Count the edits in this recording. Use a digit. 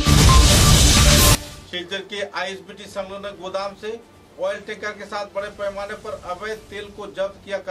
1